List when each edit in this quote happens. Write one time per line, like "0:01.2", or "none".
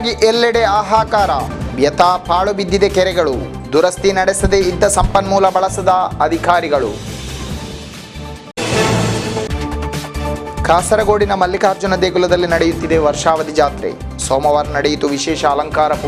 none